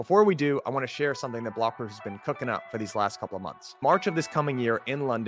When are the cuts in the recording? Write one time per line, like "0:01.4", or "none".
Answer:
none